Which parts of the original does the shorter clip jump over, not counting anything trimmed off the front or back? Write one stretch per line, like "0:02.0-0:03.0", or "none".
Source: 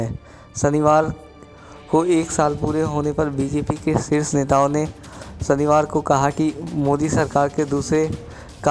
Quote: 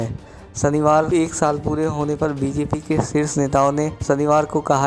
0:01.1-0:02.1
0:04.9-0:05.4